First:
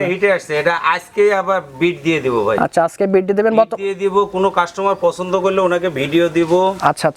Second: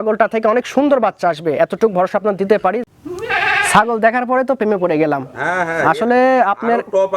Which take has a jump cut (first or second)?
second